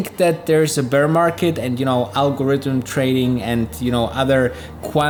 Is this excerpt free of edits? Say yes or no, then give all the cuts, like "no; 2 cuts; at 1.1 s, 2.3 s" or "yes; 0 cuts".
yes; 0 cuts